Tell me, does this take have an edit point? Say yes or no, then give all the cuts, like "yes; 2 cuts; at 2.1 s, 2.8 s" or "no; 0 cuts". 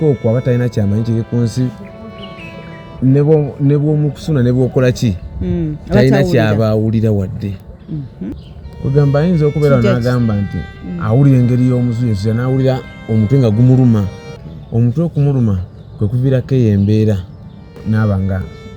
yes; 2 cuts; at 8.4 s, 17.8 s